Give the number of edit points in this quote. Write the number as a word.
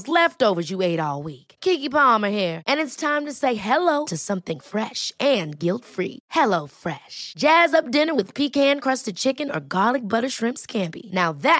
zero